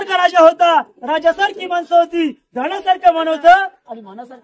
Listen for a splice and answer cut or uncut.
uncut